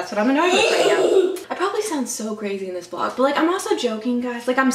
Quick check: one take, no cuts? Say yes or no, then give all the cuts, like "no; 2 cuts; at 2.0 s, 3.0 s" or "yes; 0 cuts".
no; 1 cut; at 1.4 s